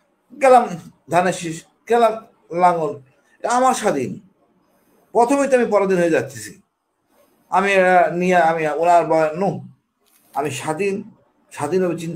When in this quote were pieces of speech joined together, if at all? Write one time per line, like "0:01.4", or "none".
none